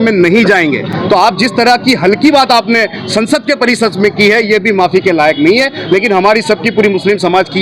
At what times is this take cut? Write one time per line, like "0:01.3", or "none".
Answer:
none